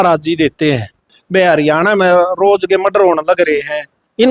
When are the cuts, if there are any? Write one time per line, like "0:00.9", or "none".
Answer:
0:01.2

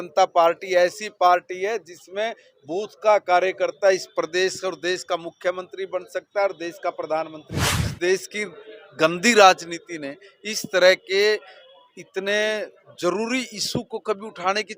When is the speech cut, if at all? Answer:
0:07.8

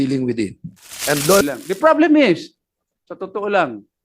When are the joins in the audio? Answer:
0:01.4

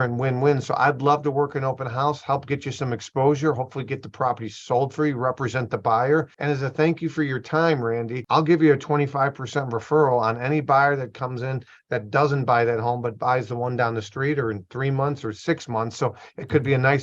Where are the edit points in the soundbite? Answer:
0:06.3
0:08.2

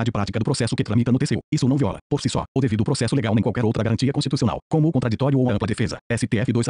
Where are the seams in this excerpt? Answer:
0:01.7
0:05.7

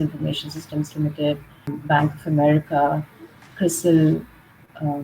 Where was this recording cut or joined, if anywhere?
0:01.8

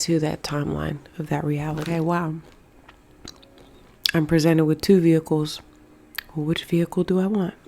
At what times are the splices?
0:01.8

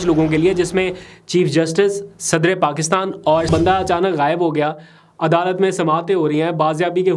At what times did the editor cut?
0:03.5

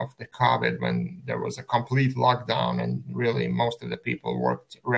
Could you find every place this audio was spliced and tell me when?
none

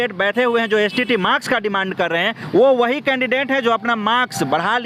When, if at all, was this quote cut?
none

